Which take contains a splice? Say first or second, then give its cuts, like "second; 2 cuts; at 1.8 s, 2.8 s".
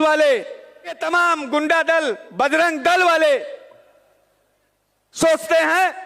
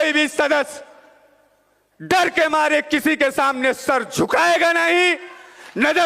first; 1 cut; at 1.0 s